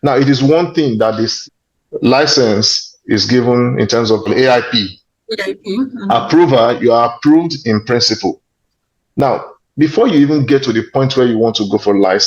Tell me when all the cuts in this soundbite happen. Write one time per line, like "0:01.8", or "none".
0:01.4

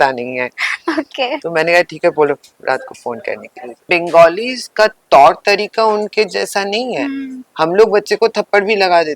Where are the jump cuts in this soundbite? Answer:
0:03.8

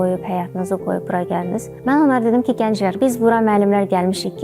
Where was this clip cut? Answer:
0:01.7
0:03.0

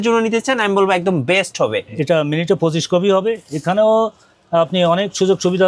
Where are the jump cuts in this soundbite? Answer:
0:01.8

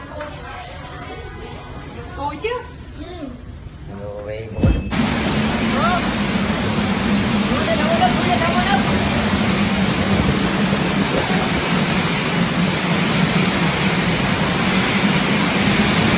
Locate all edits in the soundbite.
0:04.9

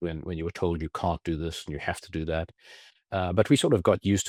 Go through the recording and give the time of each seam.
none

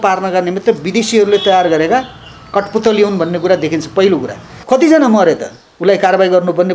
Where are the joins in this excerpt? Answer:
0:04.6

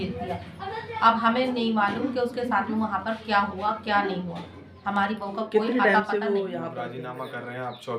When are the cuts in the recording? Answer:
0:06.9

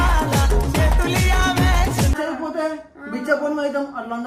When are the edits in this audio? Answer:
none

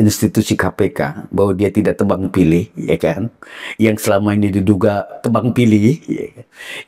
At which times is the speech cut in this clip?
none

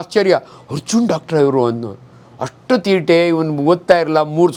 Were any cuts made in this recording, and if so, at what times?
none

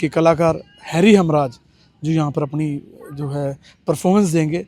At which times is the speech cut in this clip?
none

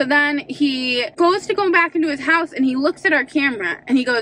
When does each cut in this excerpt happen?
0:01.1

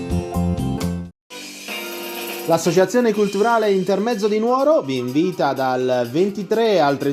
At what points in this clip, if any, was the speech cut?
0:00.9

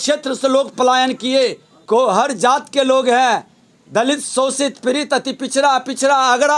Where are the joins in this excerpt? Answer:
0:01.7

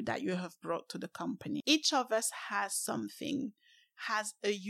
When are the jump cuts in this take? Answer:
0:01.6

